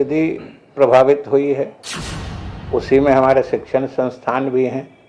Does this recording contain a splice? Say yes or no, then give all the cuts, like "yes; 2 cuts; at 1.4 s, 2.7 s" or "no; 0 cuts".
no; 0 cuts